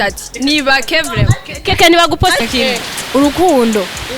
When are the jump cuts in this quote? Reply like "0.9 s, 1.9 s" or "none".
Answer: 2.4 s